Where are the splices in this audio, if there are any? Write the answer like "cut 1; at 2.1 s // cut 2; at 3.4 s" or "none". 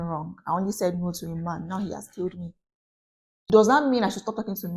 cut 1; at 3.5 s